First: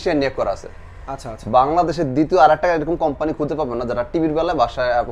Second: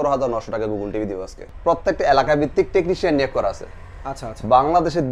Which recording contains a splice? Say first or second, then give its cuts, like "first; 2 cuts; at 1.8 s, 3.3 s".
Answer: second; 1 cut; at 1.4 s